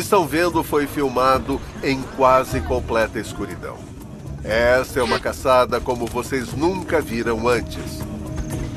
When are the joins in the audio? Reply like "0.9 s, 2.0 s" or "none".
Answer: 6.3 s

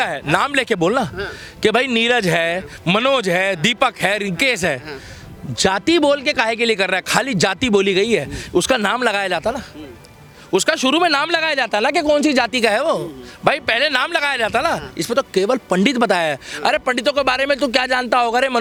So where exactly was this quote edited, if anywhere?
none

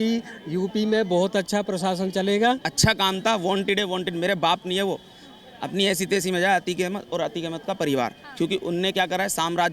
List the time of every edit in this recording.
2.7 s

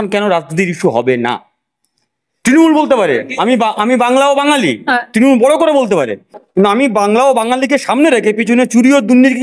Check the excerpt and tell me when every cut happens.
none

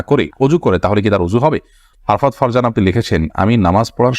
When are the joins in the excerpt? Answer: 1.9 s

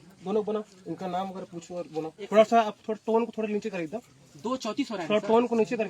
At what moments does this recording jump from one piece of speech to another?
2.2 s

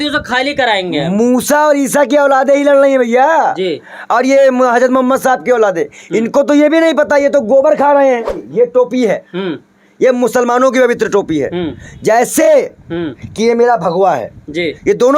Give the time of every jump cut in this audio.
8.4 s

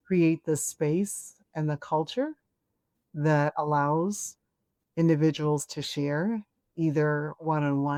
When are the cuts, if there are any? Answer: none

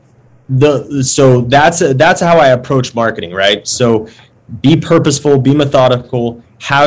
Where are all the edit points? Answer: none

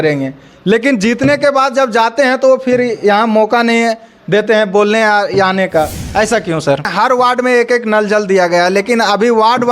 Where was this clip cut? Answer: 6.9 s

